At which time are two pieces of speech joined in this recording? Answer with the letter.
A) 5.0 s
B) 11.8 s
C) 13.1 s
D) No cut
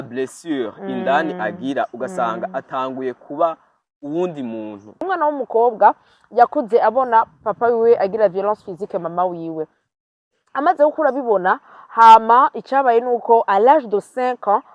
A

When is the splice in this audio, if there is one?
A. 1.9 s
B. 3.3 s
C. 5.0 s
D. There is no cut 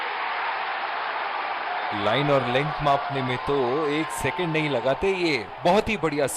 A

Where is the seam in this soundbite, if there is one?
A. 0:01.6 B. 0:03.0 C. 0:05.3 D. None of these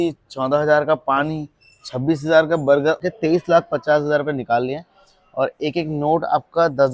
B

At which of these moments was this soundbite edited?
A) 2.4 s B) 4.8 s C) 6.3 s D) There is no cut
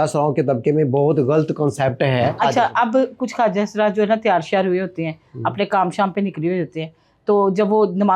A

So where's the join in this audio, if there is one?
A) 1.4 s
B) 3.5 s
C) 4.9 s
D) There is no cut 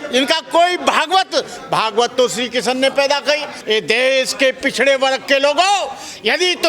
B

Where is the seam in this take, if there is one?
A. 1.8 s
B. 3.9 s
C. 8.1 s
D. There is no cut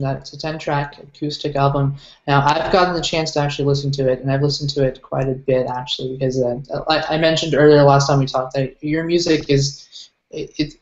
A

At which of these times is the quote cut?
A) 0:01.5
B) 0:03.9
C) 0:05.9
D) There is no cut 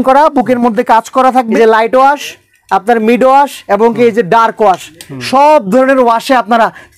A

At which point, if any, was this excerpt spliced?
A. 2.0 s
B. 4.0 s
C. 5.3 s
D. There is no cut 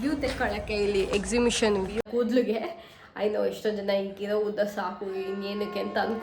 A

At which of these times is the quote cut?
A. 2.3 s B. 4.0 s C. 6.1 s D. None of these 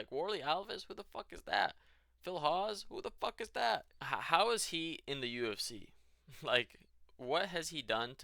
B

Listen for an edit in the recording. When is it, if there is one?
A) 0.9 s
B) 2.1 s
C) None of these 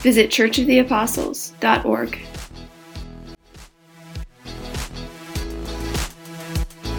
B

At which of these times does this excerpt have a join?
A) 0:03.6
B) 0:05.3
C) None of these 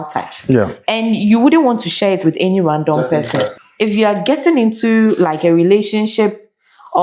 A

